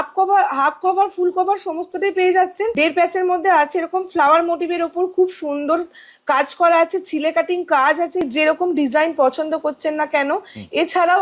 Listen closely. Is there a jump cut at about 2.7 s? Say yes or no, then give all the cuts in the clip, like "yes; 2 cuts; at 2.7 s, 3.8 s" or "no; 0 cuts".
yes; 2 cuts; at 2.7 s, 8.2 s